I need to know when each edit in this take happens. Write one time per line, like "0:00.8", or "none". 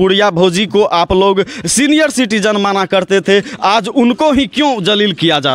none